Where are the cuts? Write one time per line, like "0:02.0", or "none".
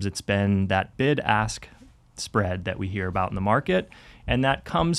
none